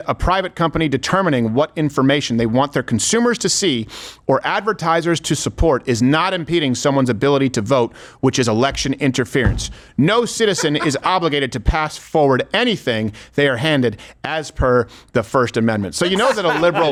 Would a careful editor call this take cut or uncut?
uncut